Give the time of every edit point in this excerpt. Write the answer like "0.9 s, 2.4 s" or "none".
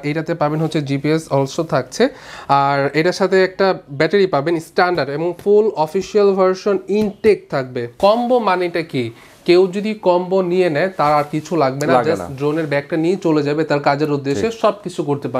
7.9 s